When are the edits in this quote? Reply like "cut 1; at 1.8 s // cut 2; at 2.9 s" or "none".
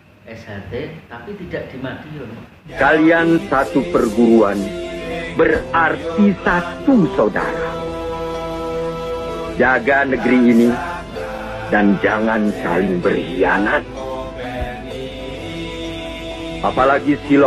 cut 1; at 2.6 s